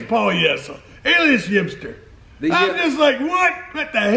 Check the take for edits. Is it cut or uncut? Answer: uncut